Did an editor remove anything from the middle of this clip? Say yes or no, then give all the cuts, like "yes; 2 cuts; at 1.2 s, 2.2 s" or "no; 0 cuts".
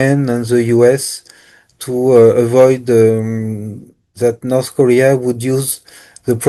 no; 0 cuts